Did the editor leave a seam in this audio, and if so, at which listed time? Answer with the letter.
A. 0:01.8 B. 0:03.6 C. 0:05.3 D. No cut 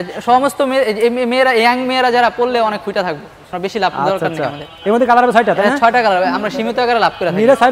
B